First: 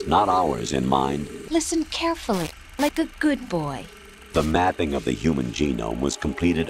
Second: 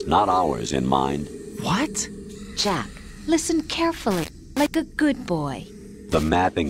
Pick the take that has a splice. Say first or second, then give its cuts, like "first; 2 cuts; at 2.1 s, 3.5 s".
first; 1 cut; at 1.4 s